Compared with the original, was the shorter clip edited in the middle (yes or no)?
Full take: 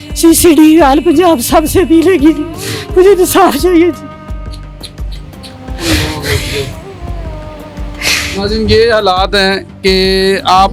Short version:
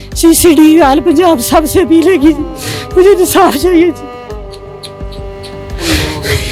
no